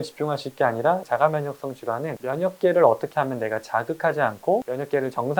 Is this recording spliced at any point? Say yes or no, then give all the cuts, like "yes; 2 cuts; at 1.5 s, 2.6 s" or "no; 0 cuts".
yes; 1 cut; at 2.2 s